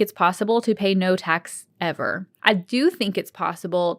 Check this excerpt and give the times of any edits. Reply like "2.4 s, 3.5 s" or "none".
2.3 s